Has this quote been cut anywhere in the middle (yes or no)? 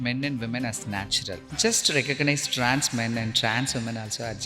yes